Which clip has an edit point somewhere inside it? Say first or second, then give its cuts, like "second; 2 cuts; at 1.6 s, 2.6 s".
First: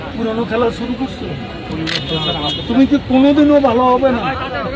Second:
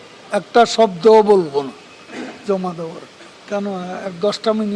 second; 1 cut; at 3.4 s